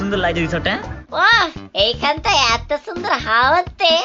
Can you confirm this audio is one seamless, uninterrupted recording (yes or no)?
no